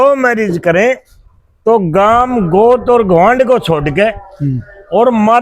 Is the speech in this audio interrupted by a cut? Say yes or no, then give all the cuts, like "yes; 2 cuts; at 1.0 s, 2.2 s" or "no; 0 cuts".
no; 0 cuts